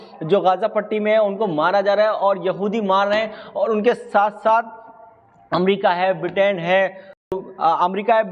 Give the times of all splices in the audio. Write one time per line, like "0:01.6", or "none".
0:07.2